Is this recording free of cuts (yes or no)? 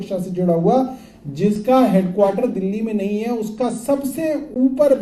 yes